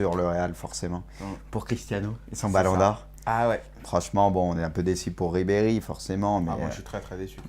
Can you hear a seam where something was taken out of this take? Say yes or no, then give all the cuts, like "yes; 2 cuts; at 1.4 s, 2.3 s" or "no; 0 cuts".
yes; 1 cut; at 4.6 s